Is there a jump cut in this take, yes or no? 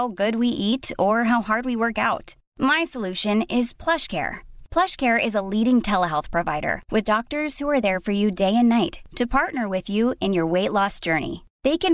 no